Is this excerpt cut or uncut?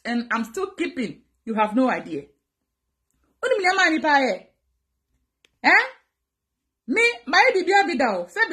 uncut